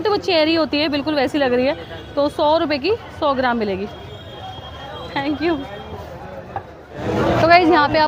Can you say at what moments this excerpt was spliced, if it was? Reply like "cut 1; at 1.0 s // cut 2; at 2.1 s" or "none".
none